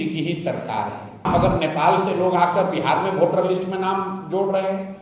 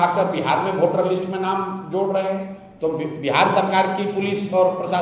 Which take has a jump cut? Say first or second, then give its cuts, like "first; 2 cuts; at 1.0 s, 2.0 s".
first; 1 cut; at 1.3 s